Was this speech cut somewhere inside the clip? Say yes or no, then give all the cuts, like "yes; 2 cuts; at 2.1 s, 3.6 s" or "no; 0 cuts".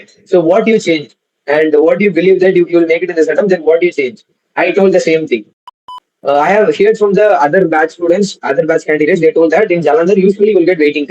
yes; 1 cut; at 5.7 s